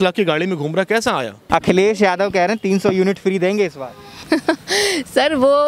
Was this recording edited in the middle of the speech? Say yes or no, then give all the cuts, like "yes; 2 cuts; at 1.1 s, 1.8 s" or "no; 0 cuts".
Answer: yes; 1 cut; at 1.3 s